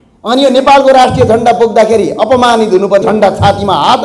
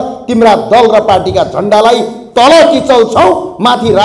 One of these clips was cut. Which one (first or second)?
first